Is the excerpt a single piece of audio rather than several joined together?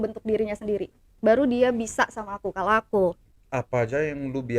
no; 1 cut; at 3.3 s

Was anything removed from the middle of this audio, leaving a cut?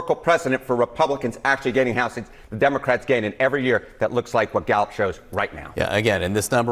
no; 0 cuts

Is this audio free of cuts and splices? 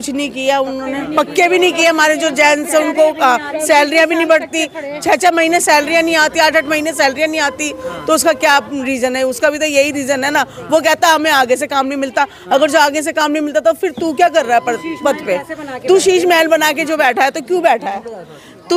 yes; 0 cuts

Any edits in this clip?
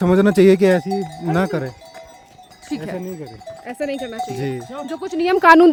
no; 0 cuts

